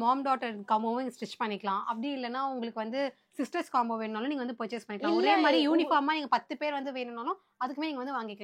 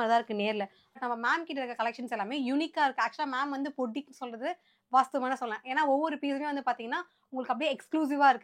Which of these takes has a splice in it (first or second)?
second